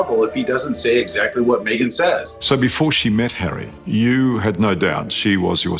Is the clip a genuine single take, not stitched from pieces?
no; 1 cut; at 2.3 s

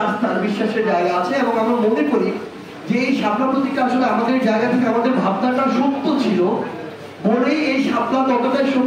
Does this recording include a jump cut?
no; 0 cuts

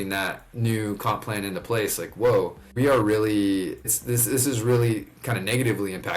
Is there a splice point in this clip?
yes; 2 cuts; at 2.6 s, 3.9 s

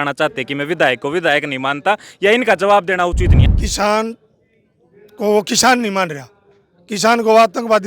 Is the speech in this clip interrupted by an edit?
yes; 1 cut; at 3.4 s

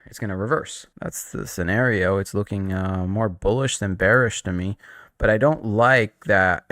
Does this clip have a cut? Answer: yes; 1 cut; at 0.9 s

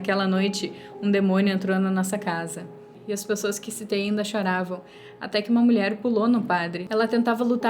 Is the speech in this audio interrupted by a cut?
yes; 2 cuts; at 2.9 s, 6.8 s

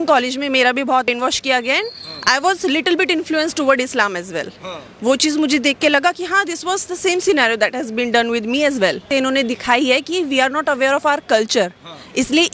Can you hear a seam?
yes; 2 cuts; at 1.1 s, 9.0 s

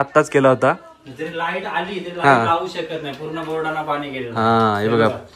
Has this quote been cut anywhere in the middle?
no; 0 cuts

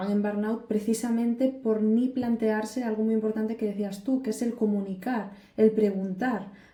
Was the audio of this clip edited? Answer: no; 0 cuts

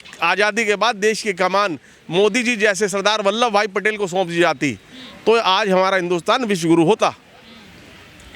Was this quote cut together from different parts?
no; 0 cuts

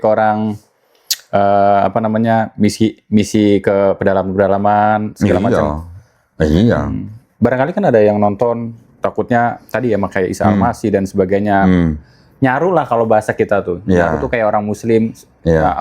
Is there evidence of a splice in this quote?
no; 0 cuts

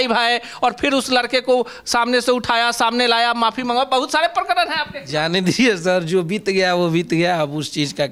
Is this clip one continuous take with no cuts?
yes; 0 cuts

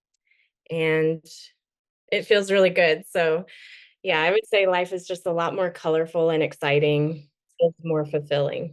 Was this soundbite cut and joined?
yes; 1 cut; at 7.4 s

